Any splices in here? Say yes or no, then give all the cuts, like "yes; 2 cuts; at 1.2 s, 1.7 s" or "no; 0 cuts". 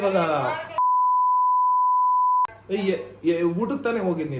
no; 0 cuts